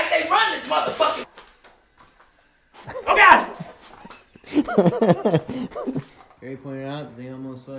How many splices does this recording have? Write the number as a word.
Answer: two